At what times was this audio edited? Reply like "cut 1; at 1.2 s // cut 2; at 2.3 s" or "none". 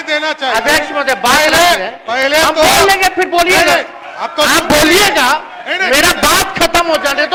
none